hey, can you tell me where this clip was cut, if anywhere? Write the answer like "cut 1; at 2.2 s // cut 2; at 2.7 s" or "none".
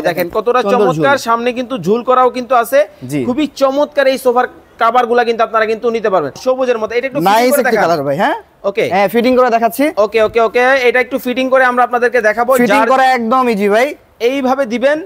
cut 1; at 6.4 s